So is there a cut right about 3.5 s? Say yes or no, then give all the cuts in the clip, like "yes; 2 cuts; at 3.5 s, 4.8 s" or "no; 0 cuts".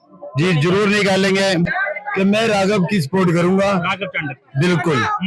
no; 1 cut; at 1.7 s